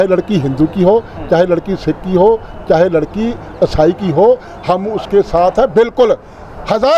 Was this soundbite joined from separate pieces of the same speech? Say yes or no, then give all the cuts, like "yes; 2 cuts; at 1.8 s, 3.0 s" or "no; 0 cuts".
no; 0 cuts